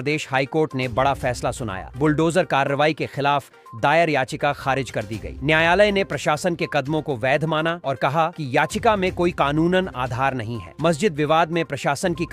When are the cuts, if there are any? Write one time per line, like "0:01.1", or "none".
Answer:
none